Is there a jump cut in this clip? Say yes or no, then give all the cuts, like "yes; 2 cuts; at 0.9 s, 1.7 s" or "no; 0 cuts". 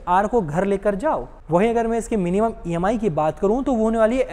no; 0 cuts